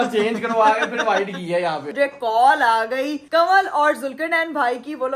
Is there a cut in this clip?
yes; 2 cuts; at 1.9 s, 3.2 s

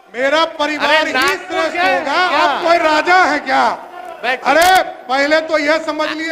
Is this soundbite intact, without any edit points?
no; 1 cut; at 2.3 s

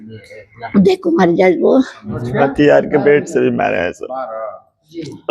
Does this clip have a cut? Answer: yes; 1 cut; at 2.2 s

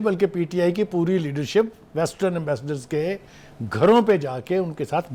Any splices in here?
no; 0 cuts

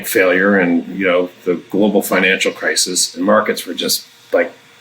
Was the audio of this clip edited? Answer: yes; 1 cut; at 3.2 s

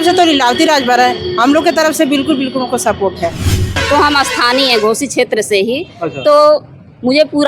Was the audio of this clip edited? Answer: yes; 1 cut; at 3.8 s

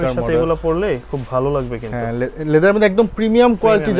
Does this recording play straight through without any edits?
yes; 0 cuts

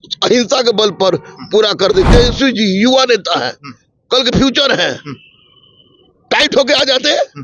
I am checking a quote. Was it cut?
yes; 1 cut; at 2.1 s

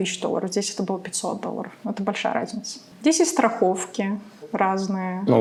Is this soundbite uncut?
yes; 0 cuts

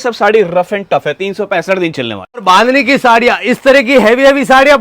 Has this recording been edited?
yes; 1 cut; at 2.4 s

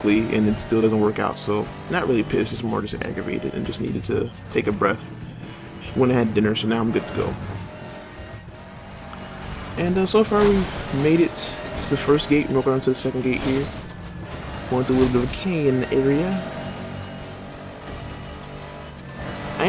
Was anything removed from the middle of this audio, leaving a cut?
no; 0 cuts

